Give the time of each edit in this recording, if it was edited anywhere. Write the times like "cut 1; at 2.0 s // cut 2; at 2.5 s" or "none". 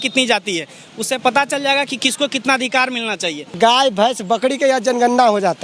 cut 1; at 3.6 s